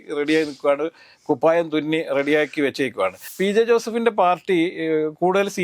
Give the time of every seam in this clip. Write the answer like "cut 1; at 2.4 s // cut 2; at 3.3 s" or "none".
cut 1; at 3.2 s